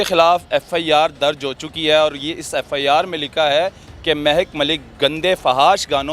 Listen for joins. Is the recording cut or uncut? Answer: uncut